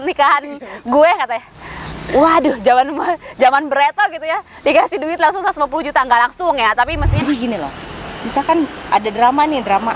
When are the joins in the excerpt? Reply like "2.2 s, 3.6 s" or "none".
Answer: 7.2 s